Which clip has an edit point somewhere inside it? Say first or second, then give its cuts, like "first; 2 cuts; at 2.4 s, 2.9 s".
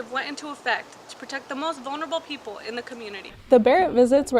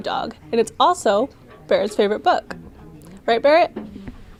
first; 1 cut; at 3.3 s